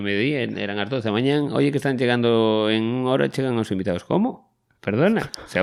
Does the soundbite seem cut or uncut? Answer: uncut